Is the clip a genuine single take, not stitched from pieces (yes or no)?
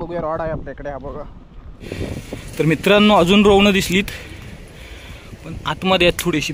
no